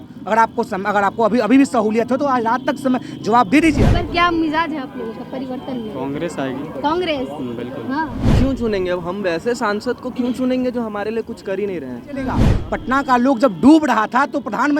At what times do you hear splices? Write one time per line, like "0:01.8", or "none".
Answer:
0:03.9
0:08.2
0:12.5

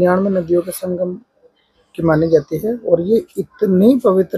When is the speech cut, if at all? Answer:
none

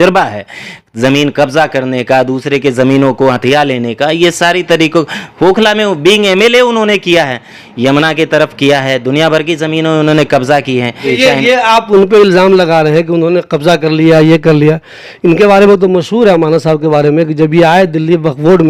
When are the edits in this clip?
none

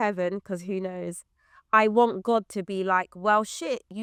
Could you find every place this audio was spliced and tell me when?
none

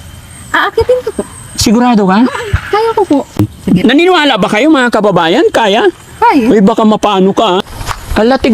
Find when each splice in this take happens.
0:03.5
0:07.6

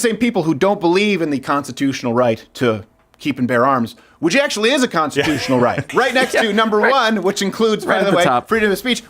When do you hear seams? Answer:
0:05.8

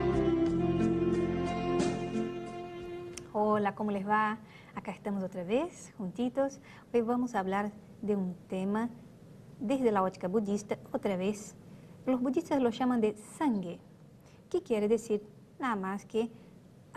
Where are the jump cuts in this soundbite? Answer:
none

